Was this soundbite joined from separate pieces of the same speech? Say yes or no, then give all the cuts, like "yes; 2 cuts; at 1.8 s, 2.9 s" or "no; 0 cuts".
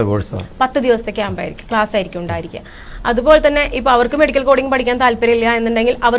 yes; 1 cut; at 2.8 s